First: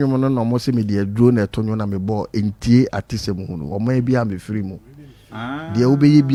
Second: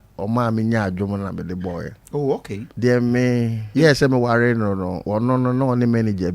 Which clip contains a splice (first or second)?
second